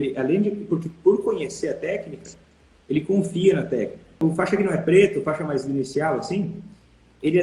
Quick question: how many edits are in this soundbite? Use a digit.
1